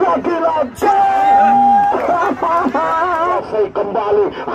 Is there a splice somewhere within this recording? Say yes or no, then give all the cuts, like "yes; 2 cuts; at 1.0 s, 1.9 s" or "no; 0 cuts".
yes; 1 cut; at 3.3 s